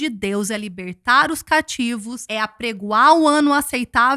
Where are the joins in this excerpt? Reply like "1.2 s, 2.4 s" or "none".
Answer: 2.2 s